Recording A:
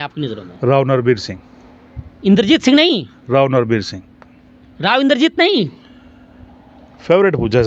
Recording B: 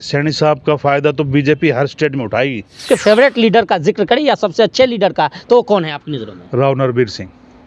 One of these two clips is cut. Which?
B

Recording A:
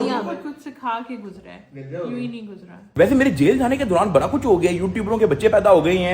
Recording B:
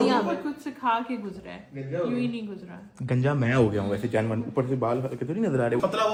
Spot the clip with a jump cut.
A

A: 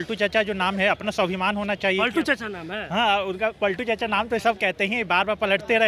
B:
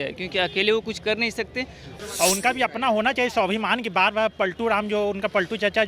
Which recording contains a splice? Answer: B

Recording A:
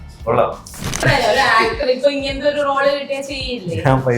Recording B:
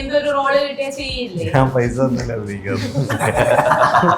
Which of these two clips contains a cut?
A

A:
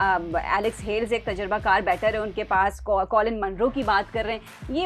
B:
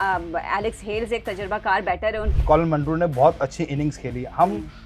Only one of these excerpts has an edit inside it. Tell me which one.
B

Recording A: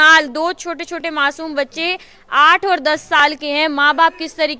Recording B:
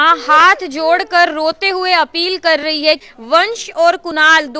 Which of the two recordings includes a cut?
B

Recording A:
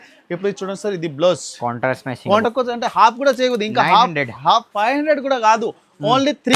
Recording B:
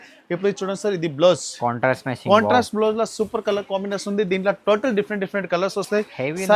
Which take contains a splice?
A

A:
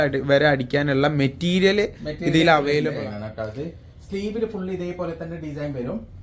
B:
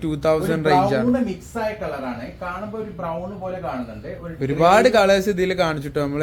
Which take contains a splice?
A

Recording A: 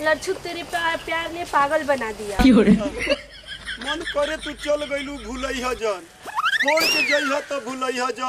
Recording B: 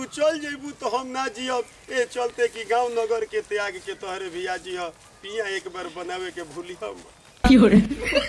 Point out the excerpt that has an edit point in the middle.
B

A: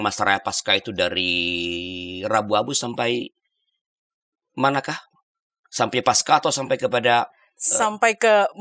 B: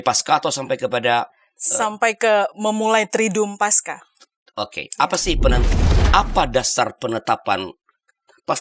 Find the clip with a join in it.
B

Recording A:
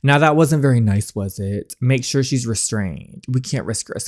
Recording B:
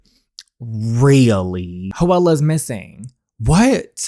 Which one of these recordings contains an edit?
B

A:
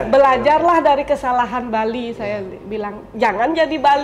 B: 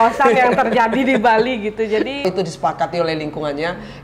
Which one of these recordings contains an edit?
B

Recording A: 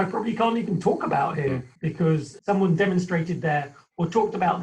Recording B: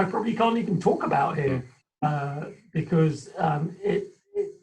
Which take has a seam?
A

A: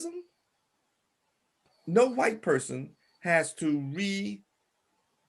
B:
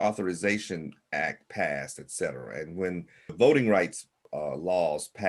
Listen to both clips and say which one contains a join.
B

